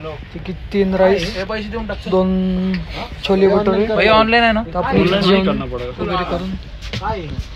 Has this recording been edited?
no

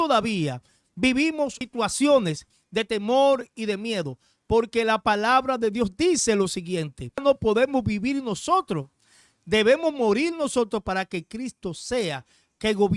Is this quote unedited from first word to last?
no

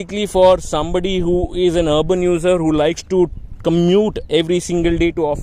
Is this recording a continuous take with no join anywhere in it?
yes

